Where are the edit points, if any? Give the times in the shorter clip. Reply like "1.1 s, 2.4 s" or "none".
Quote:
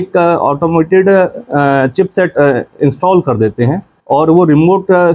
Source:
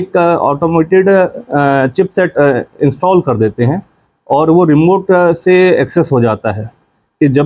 3.9 s